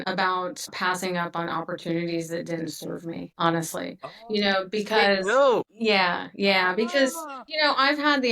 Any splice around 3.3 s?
no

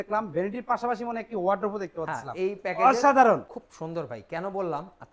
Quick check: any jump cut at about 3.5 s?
no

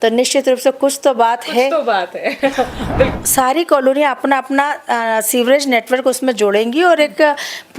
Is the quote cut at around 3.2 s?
yes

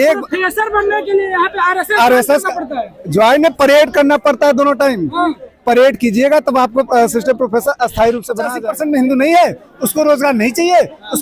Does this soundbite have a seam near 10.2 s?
no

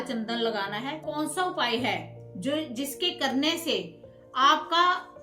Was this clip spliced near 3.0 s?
no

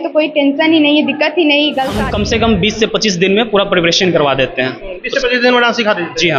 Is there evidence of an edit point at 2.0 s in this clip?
yes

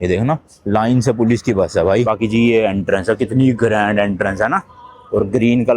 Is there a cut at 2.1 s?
yes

